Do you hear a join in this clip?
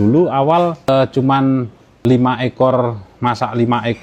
no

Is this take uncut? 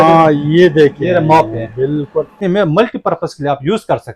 no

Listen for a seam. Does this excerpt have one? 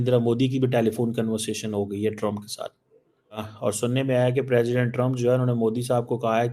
yes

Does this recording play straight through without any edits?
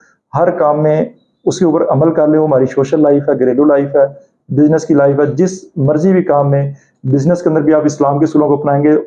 yes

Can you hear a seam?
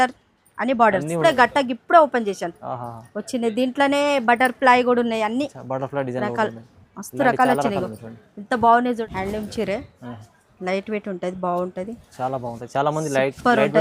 yes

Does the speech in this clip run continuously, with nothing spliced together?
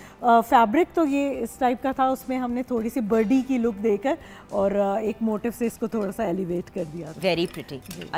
yes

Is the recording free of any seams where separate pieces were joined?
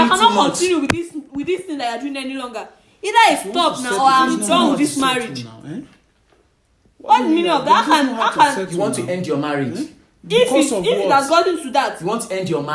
yes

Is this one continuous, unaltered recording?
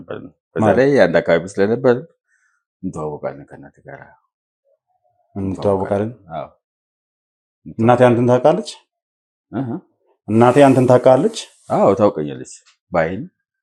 yes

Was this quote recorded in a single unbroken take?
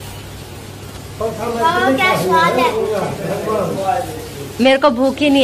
yes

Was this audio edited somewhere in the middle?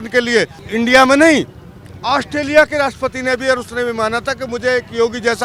no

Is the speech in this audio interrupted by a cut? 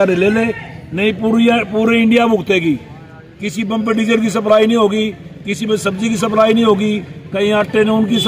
no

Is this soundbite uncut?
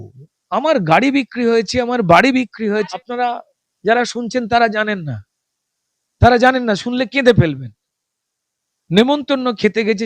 no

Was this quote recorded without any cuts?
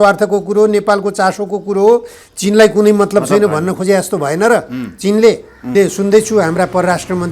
no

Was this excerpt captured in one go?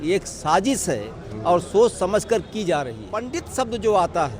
no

